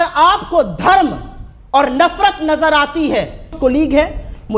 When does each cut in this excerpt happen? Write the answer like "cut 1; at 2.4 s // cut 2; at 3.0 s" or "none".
cut 1; at 3.6 s